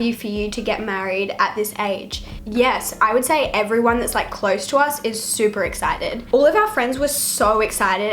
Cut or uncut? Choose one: uncut